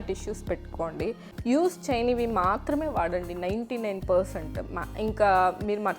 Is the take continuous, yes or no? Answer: no